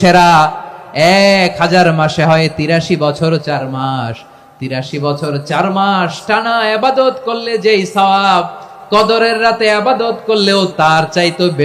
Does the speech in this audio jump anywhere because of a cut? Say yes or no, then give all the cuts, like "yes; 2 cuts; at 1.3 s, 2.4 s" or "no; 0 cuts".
yes; 1 cut; at 10.7 s